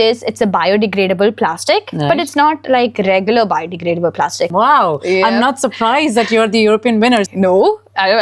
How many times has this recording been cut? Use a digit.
2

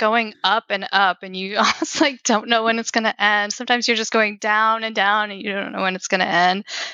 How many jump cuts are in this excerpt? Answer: 0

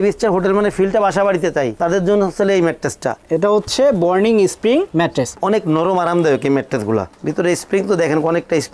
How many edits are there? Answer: 1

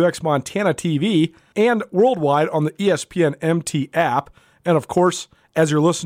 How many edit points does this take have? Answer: 1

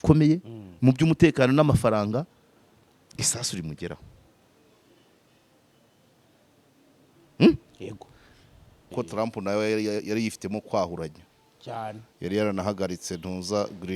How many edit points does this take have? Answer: 1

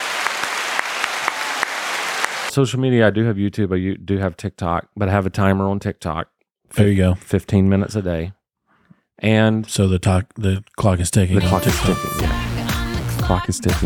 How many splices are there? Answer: 1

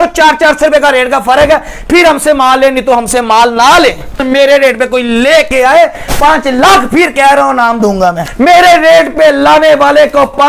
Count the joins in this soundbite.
2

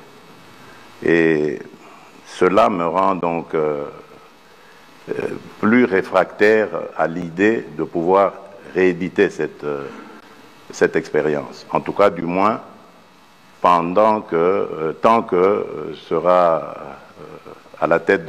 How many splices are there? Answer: 0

